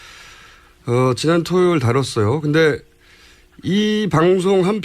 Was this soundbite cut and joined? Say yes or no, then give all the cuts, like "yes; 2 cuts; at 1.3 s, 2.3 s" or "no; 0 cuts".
yes; 1 cut; at 3.9 s